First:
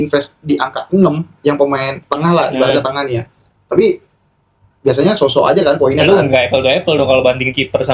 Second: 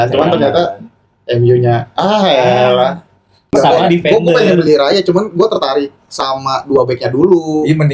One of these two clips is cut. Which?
second; 1 cut; at 3.4 s

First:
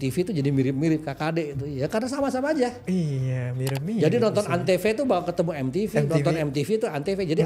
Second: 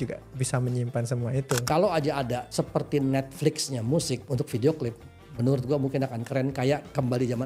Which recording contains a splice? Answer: second; 3 cuts; at 1.6 s, 2.5 s, 4.3 s

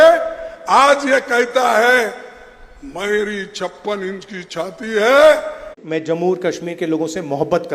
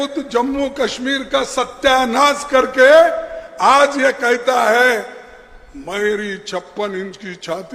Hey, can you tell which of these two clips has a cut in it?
first; 1 cut; at 5.8 s

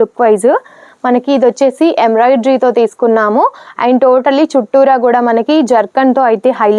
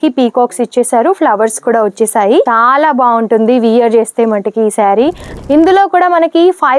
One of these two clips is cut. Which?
second; 2 cuts; at 2.5 s, 5.3 s

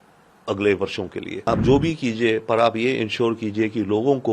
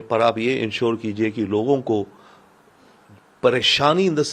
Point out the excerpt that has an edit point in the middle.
first; 1 cut; at 1.5 s

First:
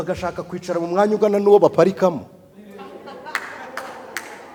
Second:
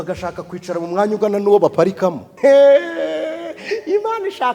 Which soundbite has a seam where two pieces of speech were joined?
second; 1 cut; at 2.3 s

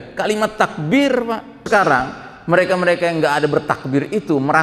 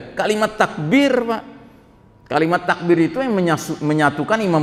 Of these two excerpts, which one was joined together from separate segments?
first; 1 cut; at 1.7 s

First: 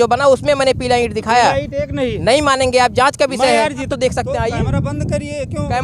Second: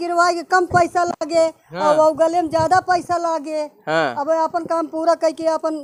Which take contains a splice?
first; 1 cut; at 3.9 s

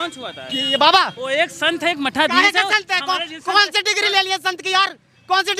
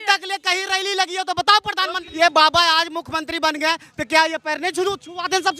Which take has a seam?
second; 1 cut; at 2.0 s

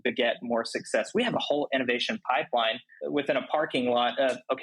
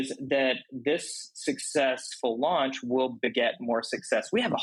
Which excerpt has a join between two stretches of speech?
first; 1 cut; at 2.9 s

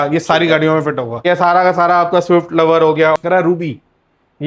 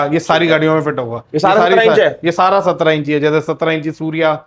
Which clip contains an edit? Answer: first; 2 cuts; at 1.2 s, 3.1 s

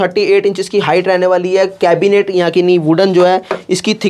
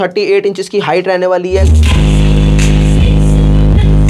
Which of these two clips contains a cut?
second; 1 cut; at 1.7 s

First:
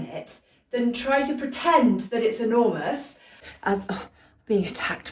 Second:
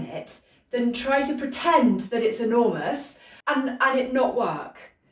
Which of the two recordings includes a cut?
first; 1 cut; at 3.3 s

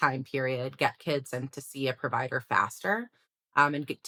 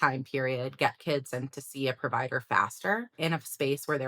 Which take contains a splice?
second; 1 cut; at 3.1 s

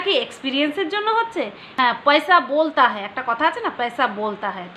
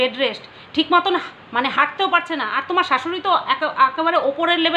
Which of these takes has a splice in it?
first; 1 cut; at 1.6 s

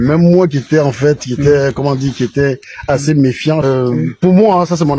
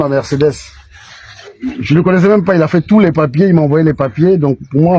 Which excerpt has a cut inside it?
first; 1 cut; at 3.6 s

